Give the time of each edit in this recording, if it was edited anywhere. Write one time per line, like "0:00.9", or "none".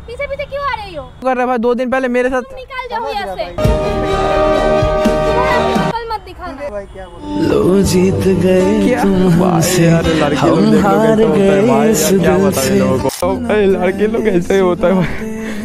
0:01.2
0:06.7
0:13.2